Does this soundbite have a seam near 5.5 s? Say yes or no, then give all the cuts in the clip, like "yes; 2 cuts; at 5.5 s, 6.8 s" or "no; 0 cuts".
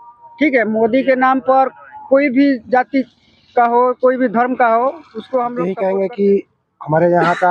yes; 1 cut; at 5.5 s